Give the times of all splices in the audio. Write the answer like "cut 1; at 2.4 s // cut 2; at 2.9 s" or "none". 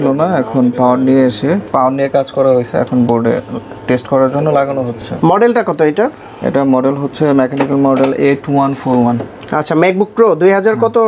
none